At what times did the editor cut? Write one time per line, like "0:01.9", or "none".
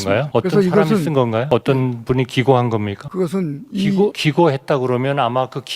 0:01.5
0:03.0
0:04.2